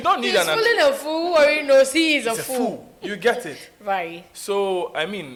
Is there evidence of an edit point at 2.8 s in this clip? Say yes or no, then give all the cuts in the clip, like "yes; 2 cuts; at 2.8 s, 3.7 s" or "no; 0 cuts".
no; 0 cuts